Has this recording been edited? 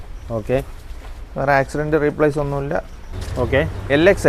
yes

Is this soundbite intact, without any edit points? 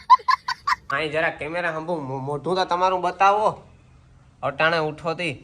no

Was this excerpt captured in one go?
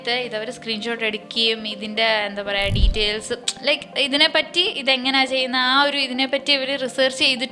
yes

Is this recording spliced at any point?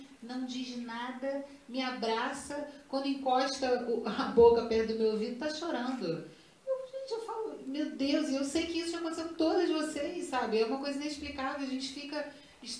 no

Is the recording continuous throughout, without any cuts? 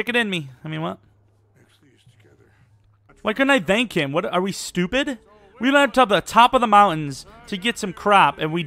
yes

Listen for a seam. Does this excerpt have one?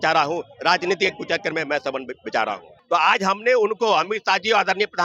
yes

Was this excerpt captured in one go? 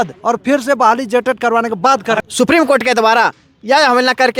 no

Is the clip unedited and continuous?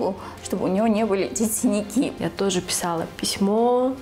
no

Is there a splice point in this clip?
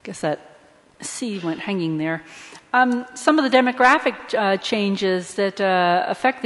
no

